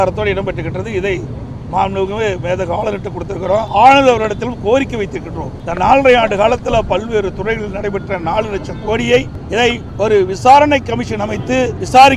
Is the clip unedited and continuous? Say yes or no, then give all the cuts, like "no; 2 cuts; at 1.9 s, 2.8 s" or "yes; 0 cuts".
yes; 0 cuts